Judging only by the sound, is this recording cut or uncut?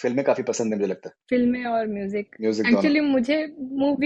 uncut